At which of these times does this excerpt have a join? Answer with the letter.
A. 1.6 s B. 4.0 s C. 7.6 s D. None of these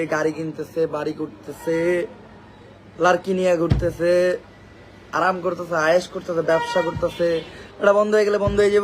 C